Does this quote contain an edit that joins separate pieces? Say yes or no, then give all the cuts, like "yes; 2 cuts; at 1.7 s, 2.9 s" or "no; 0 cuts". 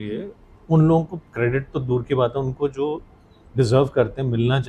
no; 0 cuts